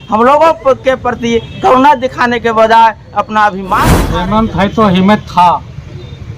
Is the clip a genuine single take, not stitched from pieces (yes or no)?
no